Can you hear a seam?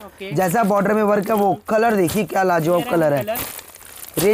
no; 0 cuts

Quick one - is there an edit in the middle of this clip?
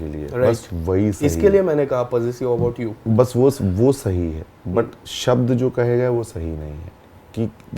no; 0 cuts

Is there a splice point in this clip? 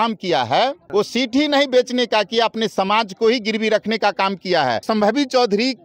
yes; 2 cuts; at 0.8 s, 4.8 s

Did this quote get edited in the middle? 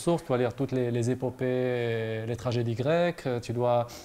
no; 0 cuts

